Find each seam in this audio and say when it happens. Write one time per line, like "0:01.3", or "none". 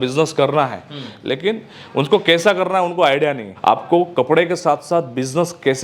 0:03.5